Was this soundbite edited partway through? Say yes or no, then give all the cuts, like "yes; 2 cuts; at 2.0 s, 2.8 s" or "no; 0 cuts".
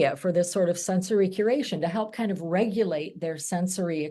no; 0 cuts